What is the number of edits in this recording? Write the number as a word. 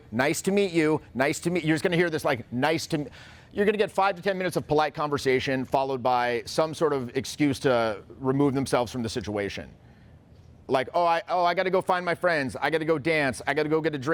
zero